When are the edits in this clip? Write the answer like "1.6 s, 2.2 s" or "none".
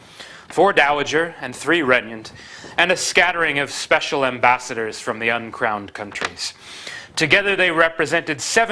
none